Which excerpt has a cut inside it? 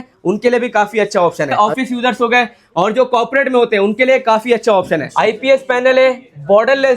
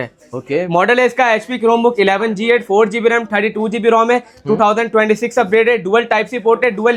first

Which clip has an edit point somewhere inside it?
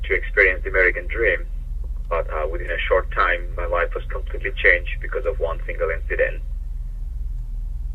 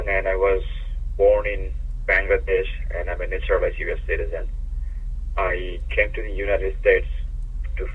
first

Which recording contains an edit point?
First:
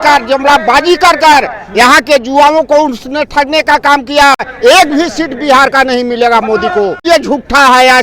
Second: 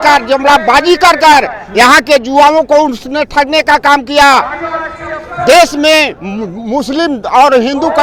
first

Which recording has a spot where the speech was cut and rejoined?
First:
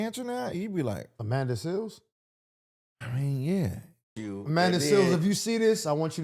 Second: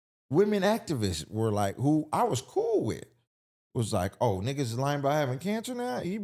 first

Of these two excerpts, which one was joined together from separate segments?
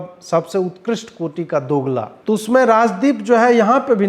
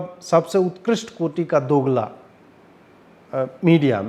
first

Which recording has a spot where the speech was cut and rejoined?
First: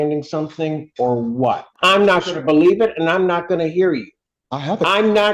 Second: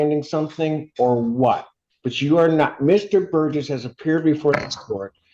first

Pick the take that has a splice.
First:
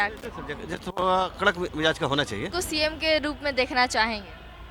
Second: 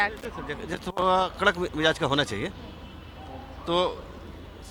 first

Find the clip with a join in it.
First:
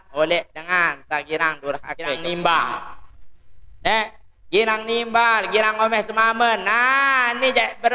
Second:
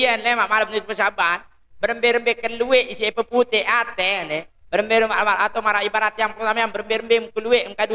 first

